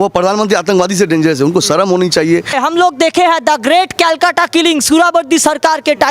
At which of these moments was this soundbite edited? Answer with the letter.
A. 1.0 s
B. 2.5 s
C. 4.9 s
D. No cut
B